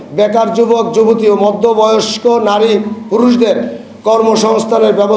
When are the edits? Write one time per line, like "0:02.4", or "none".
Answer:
none